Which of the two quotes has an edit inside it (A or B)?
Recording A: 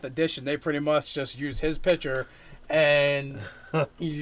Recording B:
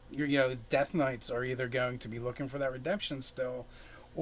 A